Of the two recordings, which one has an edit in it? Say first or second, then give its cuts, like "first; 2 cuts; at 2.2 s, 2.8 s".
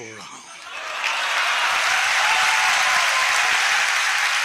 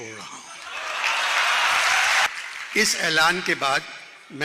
second; 1 cut; at 2.3 s